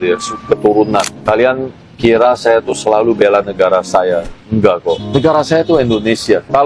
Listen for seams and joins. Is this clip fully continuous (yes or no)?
yes